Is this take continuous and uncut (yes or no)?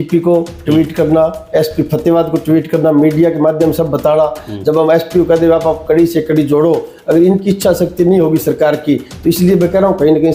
yes